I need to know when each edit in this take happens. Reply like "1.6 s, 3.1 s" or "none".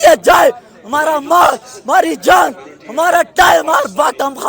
none